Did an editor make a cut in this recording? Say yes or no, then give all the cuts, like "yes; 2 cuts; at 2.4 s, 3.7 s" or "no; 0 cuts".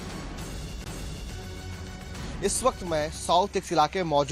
yes; 1 cut; at 2.0 s